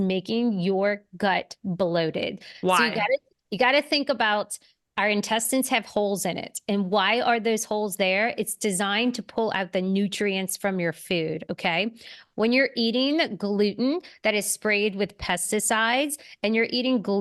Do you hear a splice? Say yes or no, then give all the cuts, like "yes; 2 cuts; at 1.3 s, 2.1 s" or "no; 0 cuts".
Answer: no; 0 cuts